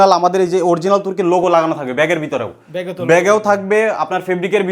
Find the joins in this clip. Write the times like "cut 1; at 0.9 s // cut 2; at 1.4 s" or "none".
none